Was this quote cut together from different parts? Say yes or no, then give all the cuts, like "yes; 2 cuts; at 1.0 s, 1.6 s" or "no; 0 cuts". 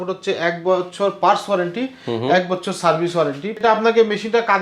yes; 1 cut; at 3.6 s